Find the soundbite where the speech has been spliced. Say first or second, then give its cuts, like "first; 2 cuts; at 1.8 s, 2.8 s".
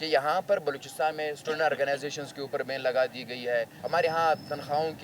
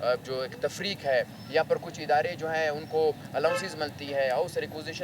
first; 1 cut; at 3.8 s